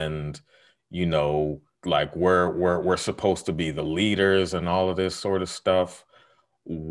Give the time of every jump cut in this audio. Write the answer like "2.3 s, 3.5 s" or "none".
1.7 s

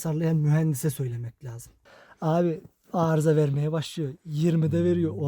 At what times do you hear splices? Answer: 1.8 s

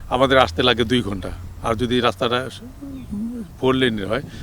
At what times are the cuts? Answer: none

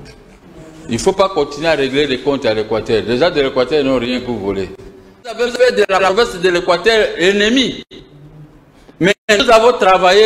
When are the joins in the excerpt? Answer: 5.4 s

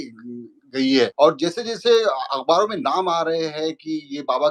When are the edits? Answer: 1.1 s

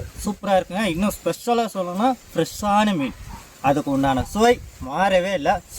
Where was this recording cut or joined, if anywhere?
none

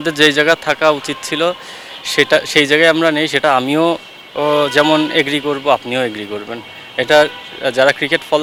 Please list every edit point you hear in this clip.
none

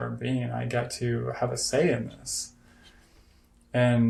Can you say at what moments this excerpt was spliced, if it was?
none

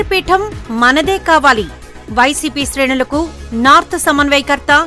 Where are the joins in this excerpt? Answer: none

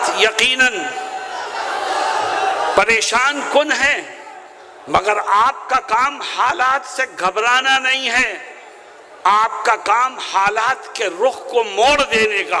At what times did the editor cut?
none

